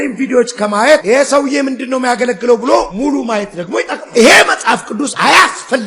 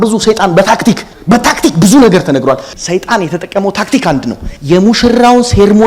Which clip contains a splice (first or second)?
second